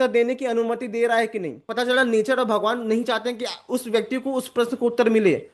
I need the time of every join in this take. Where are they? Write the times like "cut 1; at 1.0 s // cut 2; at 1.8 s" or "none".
cut 1; at 1.6 s